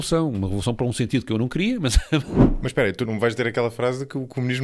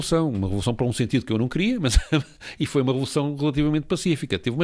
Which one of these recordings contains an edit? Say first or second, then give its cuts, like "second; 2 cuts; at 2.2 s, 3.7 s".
first; 1 cut; at 2.4 s